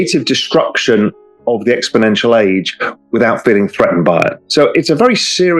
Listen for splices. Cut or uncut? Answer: cut